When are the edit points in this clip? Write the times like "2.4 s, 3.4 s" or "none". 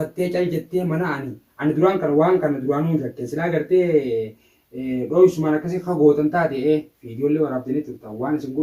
none